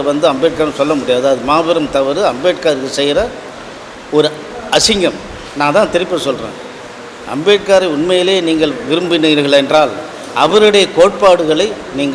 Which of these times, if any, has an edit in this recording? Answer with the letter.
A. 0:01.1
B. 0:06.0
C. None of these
C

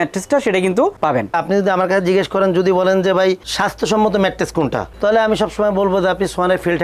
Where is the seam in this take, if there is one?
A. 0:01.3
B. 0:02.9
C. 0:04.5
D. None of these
A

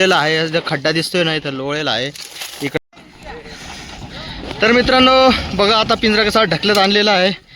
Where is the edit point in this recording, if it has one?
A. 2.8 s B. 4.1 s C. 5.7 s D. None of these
A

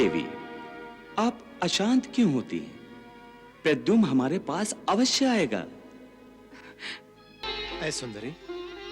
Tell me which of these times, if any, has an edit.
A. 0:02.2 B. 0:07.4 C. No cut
B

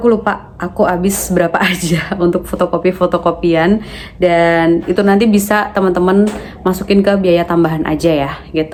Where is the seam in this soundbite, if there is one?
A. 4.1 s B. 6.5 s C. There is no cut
C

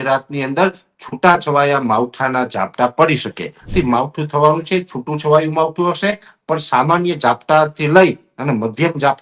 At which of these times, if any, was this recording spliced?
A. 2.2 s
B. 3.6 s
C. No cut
B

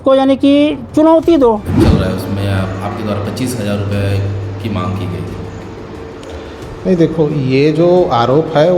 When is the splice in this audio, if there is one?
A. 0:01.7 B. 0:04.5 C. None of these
A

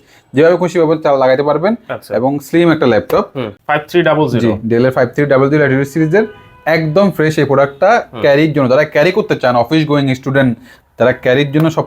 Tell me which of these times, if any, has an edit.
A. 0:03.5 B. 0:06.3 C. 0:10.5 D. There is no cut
A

